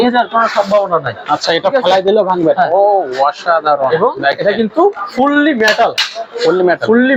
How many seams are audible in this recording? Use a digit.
0